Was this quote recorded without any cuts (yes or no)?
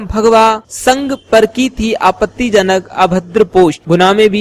yes